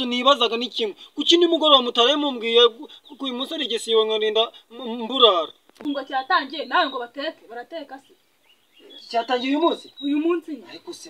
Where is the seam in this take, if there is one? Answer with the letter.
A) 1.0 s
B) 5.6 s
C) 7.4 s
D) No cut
B